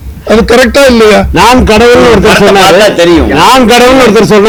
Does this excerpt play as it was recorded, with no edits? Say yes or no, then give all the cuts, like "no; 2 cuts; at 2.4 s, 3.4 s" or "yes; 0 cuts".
yes; 0 cuts